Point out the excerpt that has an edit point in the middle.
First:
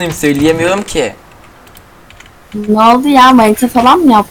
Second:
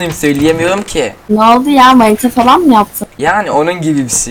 second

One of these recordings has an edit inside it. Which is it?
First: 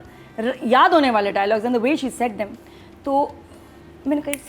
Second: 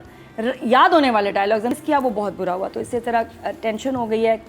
second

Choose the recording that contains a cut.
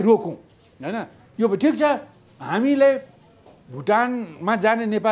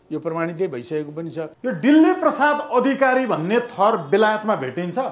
second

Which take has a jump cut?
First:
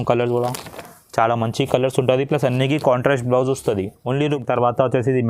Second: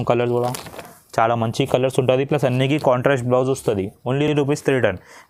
first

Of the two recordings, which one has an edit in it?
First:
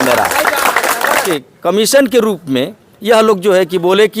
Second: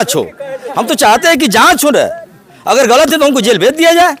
first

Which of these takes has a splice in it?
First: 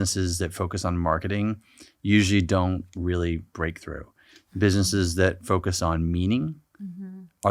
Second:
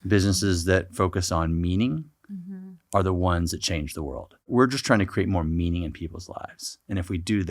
second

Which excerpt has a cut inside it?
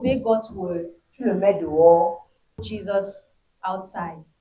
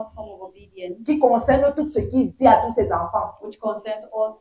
first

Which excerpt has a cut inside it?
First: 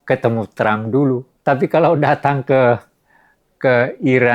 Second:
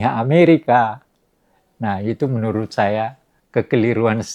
first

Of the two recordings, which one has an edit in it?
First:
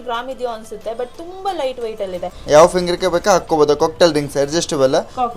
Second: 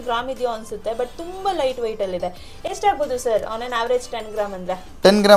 first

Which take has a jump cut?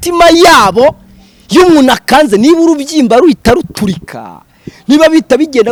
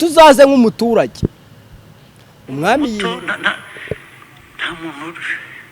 second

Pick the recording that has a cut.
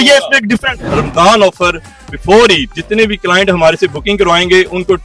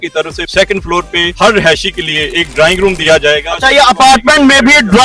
first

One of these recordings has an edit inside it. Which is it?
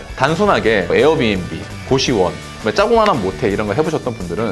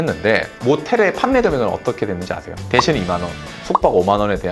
first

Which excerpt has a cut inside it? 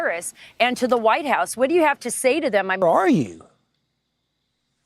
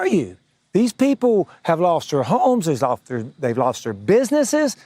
first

